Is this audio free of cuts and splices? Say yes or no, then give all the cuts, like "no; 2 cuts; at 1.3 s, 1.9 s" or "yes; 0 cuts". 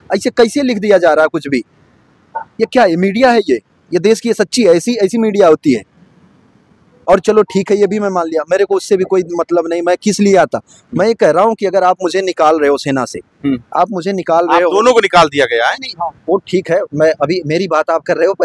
yes; 0 cuts